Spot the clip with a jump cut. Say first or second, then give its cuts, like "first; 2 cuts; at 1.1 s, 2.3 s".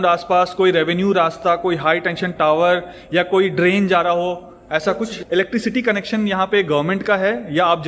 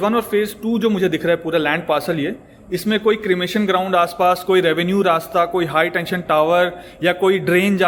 first; 1 cut; at 5.2 s